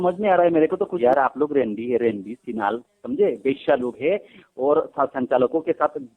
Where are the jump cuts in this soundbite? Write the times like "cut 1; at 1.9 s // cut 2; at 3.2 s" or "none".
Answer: cut 1; at 0.9 s